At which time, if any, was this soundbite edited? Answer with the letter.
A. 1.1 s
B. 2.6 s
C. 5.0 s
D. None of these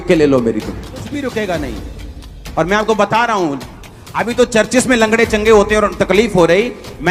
A